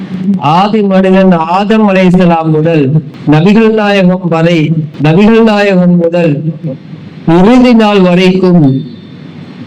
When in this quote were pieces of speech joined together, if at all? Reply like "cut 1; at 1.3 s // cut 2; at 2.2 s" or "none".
cut 1; at 3.1 s // cut 2; at 4.9 s